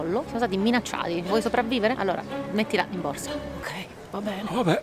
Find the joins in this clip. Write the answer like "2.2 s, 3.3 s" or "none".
1.2 s